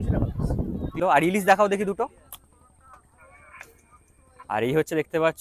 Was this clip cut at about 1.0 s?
yes; 1 cut; at 1.0 s

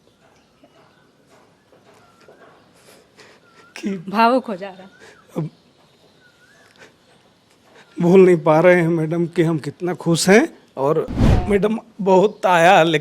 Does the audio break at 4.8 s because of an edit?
no; 1 cut; at 11.2 s

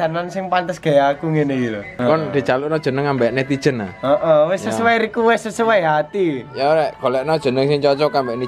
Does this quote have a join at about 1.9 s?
yes; 1 cut; at 1.9 s

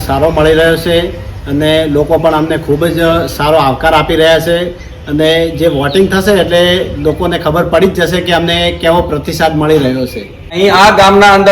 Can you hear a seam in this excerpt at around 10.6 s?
yes; 1 cut; at 10.6 s

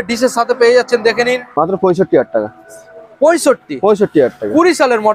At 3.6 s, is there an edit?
no; 1 cut; at 1.4 s

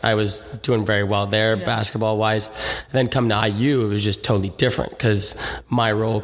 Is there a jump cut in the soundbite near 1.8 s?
no; 0 cuts

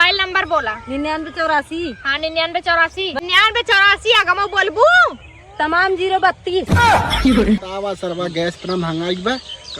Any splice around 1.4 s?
no; 1 cut; at 7.6 s

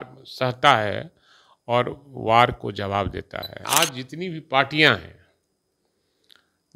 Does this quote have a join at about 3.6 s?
yes; 1 cut; at 3.6 s

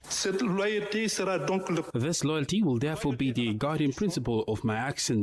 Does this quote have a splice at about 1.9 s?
yes; 1 cut; at 1.9 s

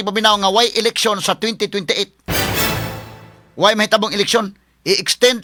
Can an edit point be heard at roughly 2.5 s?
no; 0 cuts

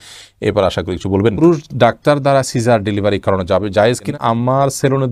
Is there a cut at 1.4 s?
yes; 2 cuts; at 1.4 s, 4.1 s

